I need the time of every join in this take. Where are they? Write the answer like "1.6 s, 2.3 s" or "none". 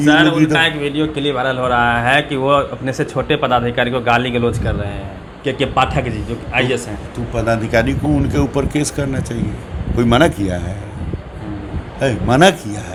none